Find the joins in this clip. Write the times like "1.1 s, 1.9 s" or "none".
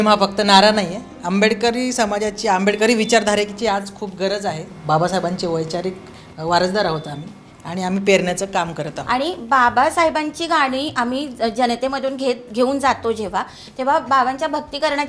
1.2 s, 4.7 s, 8.9 s